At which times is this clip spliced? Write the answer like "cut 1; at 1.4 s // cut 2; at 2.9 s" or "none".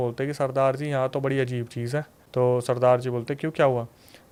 none